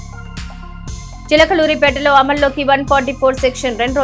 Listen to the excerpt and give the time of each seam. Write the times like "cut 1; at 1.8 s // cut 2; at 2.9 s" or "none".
cut 1; at 1.3 s